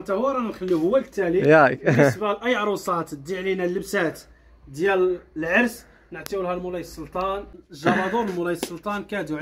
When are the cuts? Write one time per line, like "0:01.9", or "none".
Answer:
0:07.6